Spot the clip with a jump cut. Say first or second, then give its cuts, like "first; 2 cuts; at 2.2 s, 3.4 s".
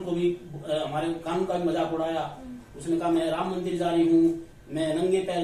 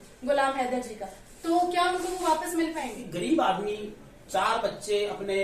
second; 1 cut; at 3.0 s